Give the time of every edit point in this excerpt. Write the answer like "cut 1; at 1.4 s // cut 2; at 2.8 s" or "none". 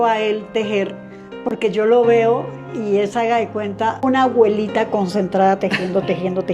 cut 1; at 4.0 s